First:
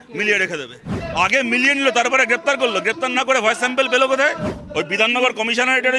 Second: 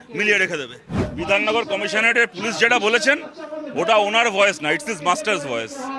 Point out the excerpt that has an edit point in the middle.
first; 2 cuts; at 0.9 s, 4.5 s

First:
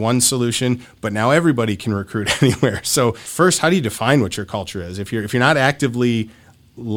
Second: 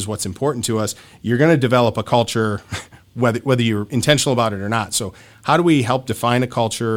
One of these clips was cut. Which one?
first; 1 cut; at 3.2 s

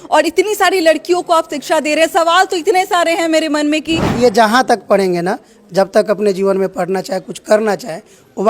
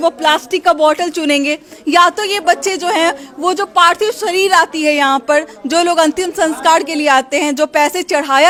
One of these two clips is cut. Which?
first; 1 cut; at 4.1 s

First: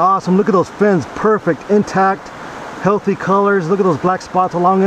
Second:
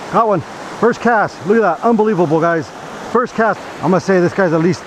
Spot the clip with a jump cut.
second; 1 cut; at 3.6 s

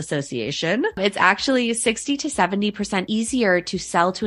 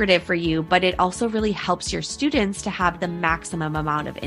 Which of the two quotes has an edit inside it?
first; 2 cuts; at 0.9 s, 3.1 s

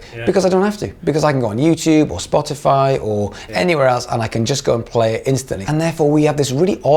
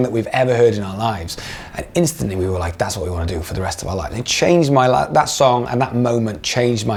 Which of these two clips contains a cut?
first; 1 cut; at 5.5 s

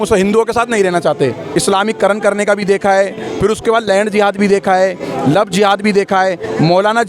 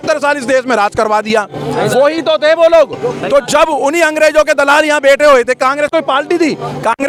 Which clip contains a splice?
first; 1 cut; at 1.4 s

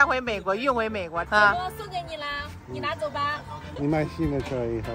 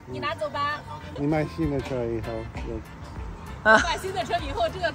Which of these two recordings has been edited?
first; 1 cut; at 1.2 s

